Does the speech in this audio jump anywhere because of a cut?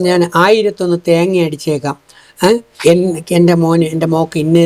no; 0 cuts

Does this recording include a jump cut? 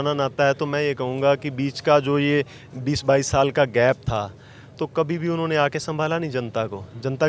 no; 0 cuts

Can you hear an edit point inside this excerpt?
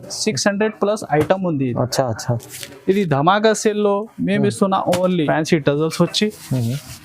yes; 1 cut; at 5.2 s

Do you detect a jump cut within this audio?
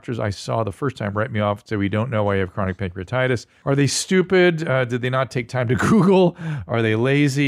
yes; 1 cut; at 3.5 s

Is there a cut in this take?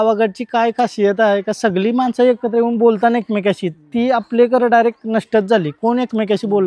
no; 0 cuts

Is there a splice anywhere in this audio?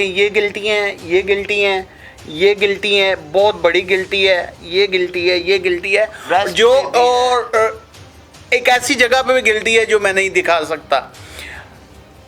no; 0 cuts

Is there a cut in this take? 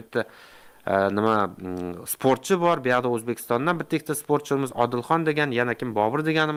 no; 0 cuts

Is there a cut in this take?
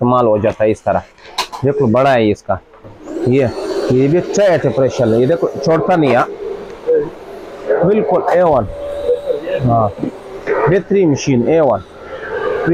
no; 0 cuts

